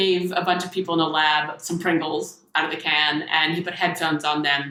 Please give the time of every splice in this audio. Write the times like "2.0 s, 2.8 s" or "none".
none